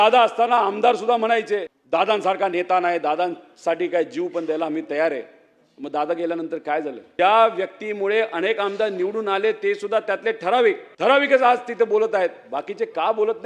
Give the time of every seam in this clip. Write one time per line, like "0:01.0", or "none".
0:01.7
0:07.0
0:10.9